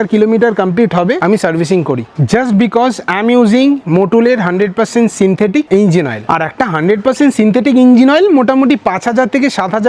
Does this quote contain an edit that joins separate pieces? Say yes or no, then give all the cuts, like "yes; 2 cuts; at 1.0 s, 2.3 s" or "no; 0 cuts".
no; 0 cuts